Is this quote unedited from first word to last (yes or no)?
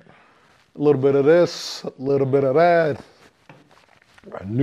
yes